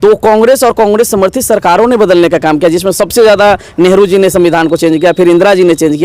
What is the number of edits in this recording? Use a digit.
0